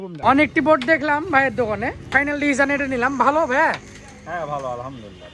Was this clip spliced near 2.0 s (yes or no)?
yes